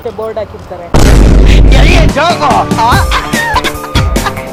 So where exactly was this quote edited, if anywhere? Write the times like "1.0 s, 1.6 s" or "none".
none

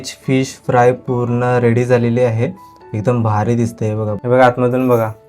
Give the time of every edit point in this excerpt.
4.2 s

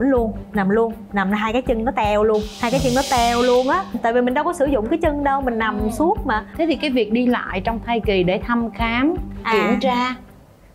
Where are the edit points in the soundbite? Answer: none

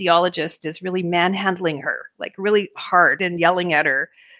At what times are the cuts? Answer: 3.2 s

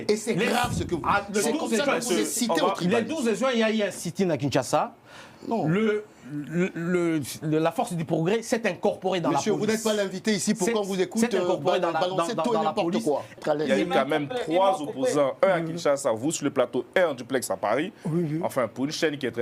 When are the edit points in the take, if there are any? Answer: 13.3 s

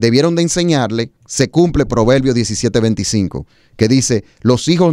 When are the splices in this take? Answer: 1.2 s

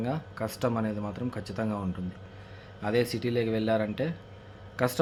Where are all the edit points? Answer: none

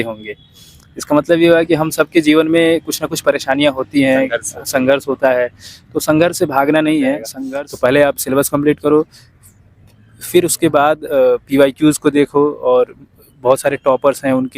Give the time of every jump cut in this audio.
7.3 s

